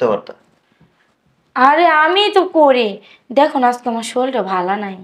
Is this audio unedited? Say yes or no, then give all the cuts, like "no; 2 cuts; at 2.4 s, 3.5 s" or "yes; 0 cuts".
yes; 0 cuts